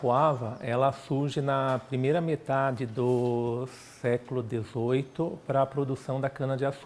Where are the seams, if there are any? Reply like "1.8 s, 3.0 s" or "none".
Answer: none